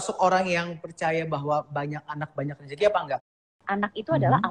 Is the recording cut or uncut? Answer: cut